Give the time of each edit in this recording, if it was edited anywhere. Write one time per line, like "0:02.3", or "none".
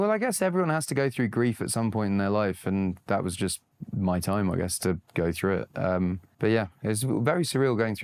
none